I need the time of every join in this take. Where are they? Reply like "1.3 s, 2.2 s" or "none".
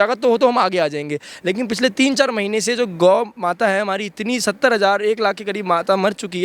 1.3 s